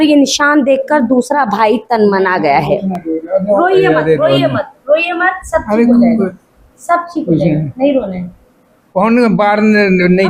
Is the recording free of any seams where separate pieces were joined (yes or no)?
yes